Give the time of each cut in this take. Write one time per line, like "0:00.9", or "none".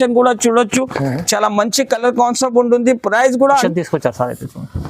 0:03.6